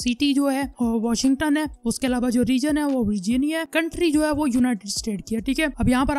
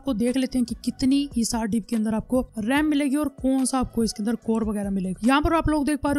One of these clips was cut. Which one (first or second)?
second